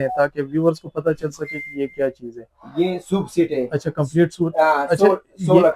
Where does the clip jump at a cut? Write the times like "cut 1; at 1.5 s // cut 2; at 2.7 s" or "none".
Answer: none